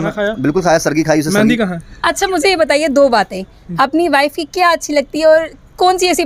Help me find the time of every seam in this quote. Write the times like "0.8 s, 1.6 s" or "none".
1.9 s